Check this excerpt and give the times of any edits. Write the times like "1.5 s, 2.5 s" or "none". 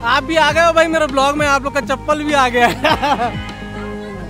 3.3 s